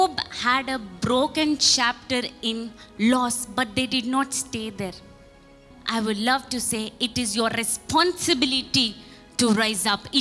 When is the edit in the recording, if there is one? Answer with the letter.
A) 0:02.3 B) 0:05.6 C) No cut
B